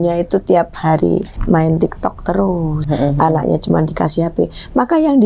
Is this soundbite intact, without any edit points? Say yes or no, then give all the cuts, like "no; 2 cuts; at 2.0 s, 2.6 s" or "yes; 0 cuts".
no; 2 cuts; at 1.3 s, 2.9 s